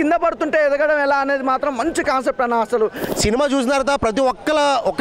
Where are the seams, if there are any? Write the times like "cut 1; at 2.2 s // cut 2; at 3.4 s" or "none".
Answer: cut 1; at 3.0 s